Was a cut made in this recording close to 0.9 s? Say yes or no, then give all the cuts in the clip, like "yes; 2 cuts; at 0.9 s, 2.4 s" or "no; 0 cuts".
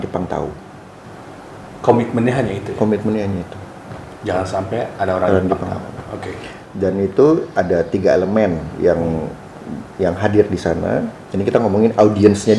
no; 0 cuts